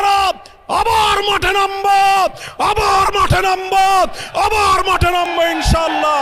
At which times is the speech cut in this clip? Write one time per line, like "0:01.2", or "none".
none